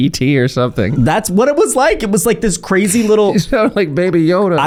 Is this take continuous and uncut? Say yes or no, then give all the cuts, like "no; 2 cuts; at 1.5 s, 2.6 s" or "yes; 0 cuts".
yes; 0 cuts